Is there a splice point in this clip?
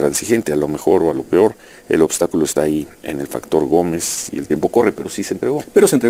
no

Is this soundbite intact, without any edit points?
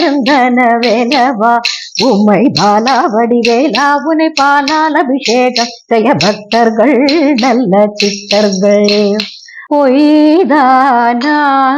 no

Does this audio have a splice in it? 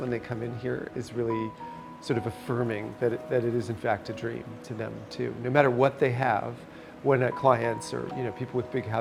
no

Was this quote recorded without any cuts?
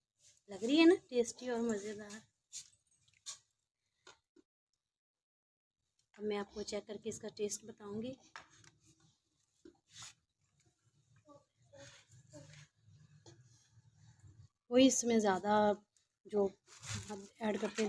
no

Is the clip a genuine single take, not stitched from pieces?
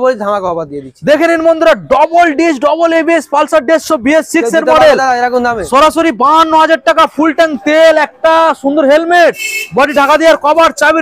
yes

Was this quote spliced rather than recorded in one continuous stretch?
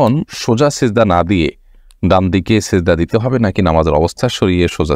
no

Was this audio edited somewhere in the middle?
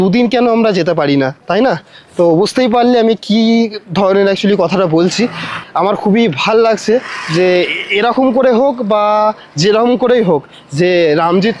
no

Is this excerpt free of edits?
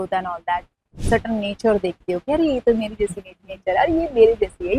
no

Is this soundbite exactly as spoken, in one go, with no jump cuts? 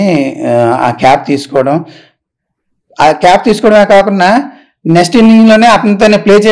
yes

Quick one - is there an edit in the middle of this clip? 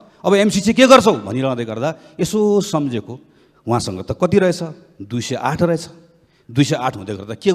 no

